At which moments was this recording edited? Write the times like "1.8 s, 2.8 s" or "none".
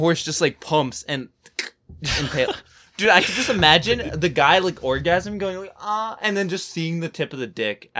none